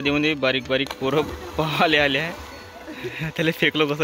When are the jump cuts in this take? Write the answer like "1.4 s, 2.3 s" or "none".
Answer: none